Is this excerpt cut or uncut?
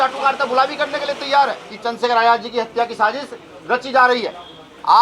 cut